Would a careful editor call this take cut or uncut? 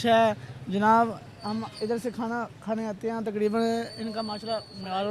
uncut